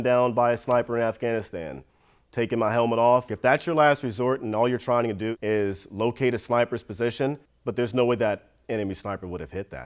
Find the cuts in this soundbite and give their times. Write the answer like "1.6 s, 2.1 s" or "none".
7.4 s